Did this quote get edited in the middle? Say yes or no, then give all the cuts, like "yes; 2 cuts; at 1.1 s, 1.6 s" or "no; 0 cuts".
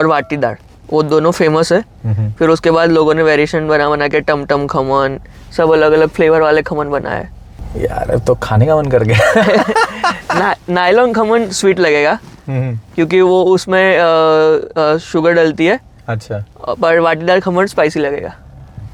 no; 0 cuts